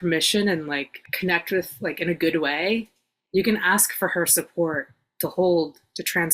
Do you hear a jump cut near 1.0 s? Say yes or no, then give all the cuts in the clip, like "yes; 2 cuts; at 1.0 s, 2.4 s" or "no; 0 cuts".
yes; 1 cut; at 1.0 s